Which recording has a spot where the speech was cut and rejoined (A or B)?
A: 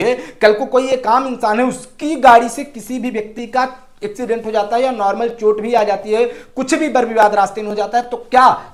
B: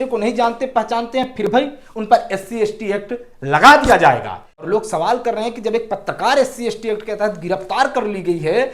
B